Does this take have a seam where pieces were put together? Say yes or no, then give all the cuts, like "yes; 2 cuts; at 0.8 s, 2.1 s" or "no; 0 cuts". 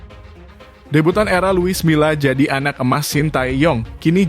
yes; 1 cut; at 0.9 s